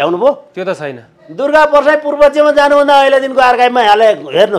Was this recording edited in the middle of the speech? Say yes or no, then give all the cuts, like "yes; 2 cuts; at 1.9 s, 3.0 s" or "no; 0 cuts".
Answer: yes; 1 cut; at 1.3 s